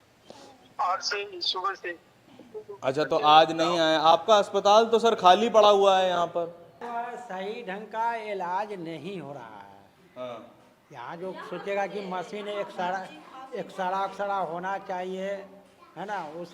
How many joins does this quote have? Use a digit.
1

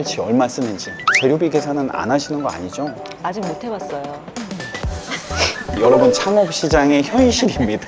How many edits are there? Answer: 0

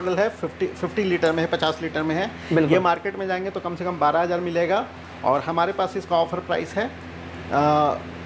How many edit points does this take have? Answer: 0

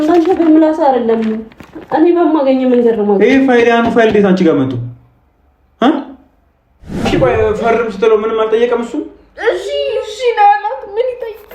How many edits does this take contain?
1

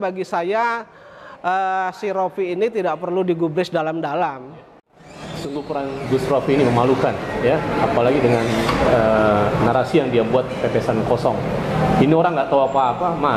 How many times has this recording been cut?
1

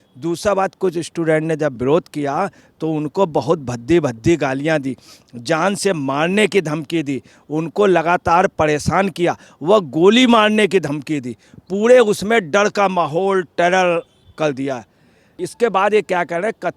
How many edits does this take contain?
1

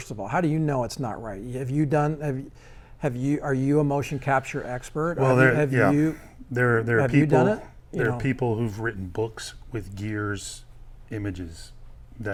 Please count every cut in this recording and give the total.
0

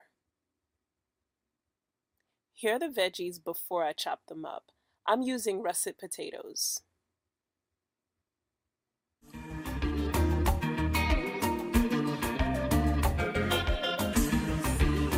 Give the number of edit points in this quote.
0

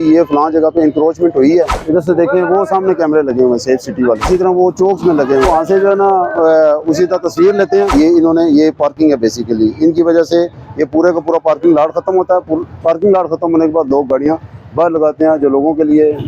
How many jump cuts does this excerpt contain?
4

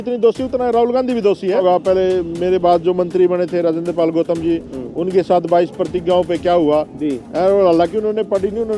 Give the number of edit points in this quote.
1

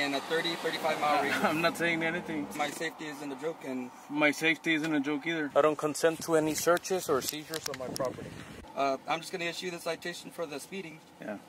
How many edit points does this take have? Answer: 3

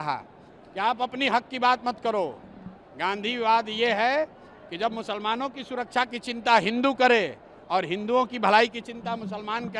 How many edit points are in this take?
0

